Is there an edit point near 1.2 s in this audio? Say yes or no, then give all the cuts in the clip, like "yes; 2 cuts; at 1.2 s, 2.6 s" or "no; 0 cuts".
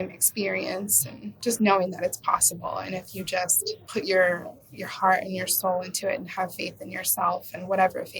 yes; 2 cuts; at 1.2 s, 3.8 s